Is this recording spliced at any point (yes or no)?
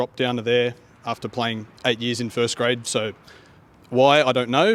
no